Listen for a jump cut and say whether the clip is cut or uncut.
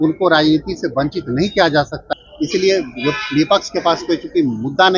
cut